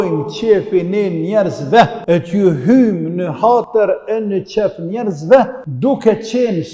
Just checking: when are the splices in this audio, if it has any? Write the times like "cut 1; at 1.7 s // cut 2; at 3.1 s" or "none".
cut 1; at 2.0 s // cut 2; at 5.6 s